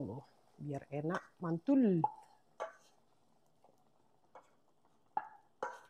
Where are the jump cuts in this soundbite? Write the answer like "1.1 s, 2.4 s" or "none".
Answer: none